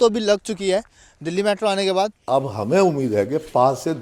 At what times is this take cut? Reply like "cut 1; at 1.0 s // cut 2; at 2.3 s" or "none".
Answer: cut 1; at 2.2 s

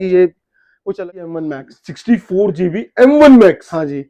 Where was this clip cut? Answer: cut 1; at 0.9 s

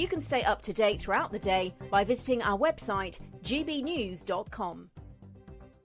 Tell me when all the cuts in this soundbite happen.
cut 1; at 4.9 s

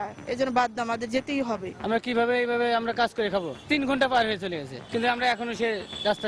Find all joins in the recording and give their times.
cut 1; at 1.8 s // cut 2; at 3.7 s // cut 3; at 4.7 s

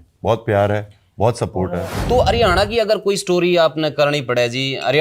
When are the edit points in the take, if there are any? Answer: cut 1; at 1.9 s

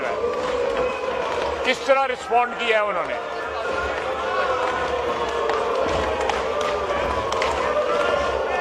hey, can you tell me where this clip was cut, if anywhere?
none

